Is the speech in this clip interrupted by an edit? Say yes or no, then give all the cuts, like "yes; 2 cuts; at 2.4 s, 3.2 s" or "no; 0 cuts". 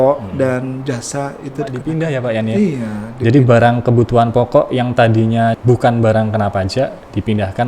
yes; 2 cuts; at 1.8 s, 5.6 s